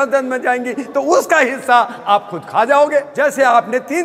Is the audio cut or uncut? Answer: cut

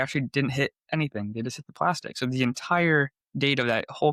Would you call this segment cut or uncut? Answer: uncut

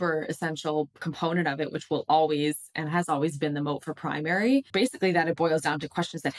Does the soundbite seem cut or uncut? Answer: cut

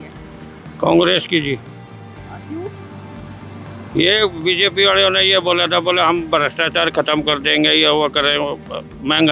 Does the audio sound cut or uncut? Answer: uncut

